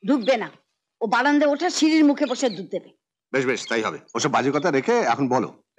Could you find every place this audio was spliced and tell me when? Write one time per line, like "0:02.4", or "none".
0:04.0